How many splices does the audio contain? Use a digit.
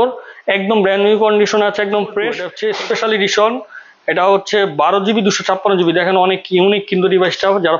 1